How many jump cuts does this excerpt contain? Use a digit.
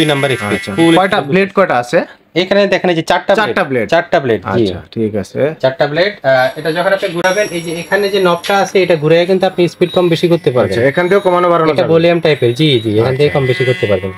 0